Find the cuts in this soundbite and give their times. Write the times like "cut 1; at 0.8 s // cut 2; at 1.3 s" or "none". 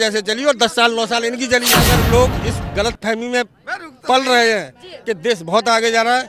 cut 1; at 1.7 s